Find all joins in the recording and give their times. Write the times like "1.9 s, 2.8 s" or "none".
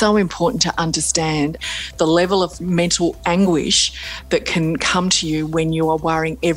1.6 s